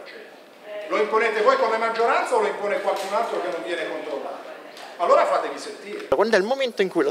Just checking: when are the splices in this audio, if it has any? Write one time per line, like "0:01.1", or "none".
0:06.1